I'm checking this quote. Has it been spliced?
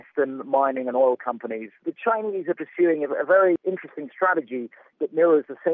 yes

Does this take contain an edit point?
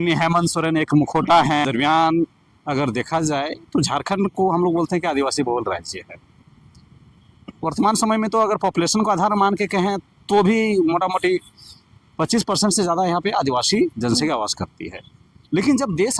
yes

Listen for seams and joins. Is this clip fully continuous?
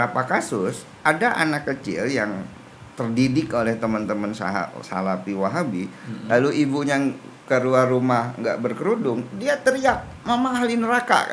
yes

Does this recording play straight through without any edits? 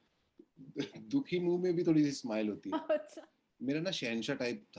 no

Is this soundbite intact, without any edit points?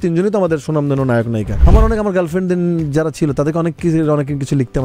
no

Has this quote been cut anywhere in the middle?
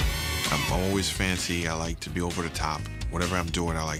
no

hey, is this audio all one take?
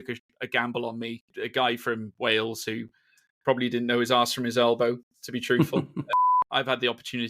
no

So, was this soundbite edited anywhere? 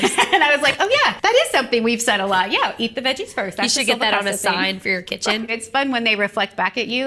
yes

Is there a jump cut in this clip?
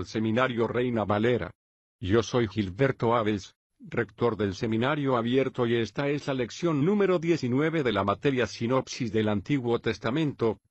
no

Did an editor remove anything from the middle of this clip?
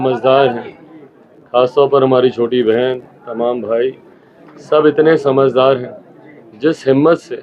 no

